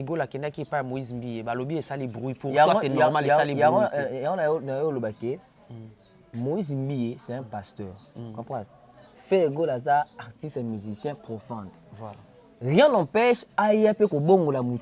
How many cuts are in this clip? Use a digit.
0